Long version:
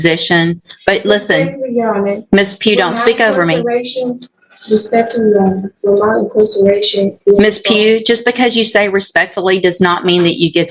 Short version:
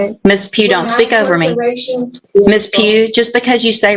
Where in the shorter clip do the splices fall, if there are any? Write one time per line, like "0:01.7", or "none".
0:02.2